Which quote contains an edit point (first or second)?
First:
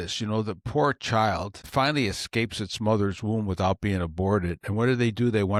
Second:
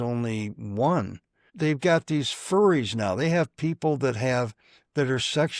second